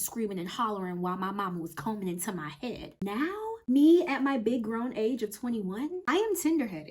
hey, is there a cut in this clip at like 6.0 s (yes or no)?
yes